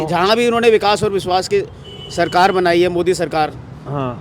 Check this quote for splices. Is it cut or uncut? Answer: uncut